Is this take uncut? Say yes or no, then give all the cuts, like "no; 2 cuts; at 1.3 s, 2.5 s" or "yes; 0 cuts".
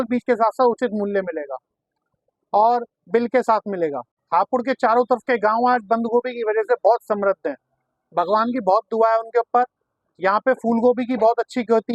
no; 1 cut; at 4.1 s